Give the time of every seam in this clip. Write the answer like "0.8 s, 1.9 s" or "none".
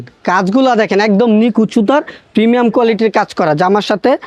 none